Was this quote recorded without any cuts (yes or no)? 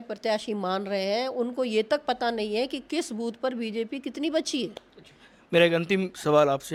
yes